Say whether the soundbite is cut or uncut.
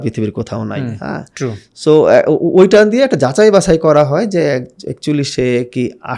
uncut